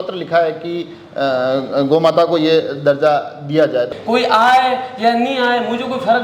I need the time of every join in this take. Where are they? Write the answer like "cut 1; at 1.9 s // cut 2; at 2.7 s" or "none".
cut 1; at 3.9 s